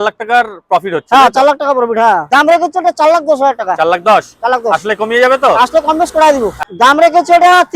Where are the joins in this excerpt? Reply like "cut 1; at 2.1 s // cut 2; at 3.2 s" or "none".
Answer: cut 1; at 2.2 s // cut 2; at 6.7 s